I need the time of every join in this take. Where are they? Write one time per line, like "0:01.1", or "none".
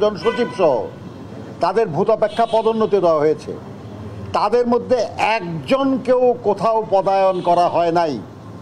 none